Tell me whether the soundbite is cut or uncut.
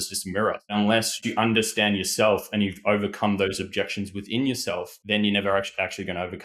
cut